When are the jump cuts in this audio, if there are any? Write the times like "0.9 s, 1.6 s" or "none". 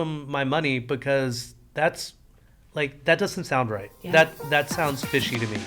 none